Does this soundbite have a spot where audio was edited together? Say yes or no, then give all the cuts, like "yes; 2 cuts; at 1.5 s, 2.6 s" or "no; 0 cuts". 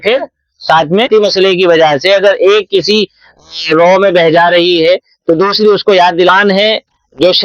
yes; 2 cuts; at 1.1 s, 6.3 s